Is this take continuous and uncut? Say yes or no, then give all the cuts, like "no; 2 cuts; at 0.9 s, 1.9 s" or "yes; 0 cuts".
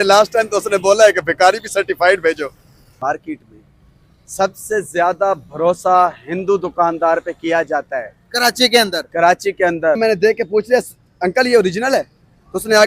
no; 2 cuts; at 2.9 s, 10.0 s